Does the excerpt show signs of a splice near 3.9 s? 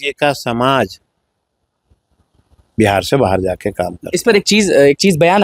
no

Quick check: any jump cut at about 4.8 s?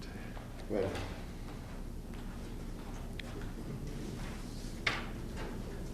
no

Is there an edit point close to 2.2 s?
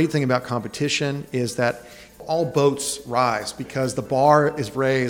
yes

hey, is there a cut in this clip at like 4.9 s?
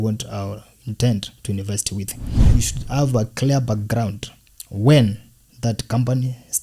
no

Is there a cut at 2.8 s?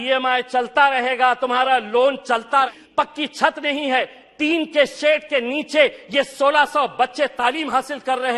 yes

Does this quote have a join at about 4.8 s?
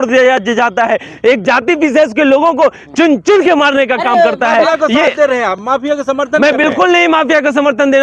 no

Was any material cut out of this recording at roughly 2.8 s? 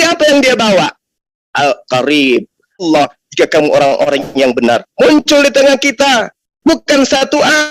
yes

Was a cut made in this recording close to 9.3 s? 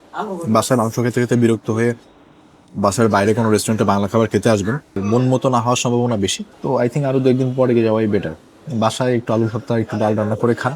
no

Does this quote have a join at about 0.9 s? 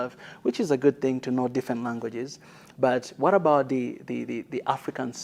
no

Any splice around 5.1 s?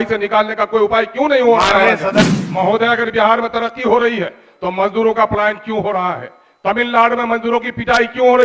no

